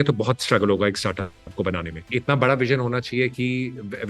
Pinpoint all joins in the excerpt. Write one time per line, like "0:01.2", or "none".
0:02.1